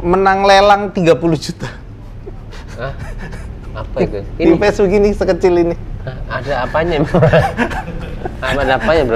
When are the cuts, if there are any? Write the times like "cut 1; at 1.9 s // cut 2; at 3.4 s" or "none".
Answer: none